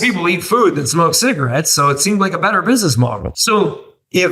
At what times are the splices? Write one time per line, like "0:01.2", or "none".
0:03.3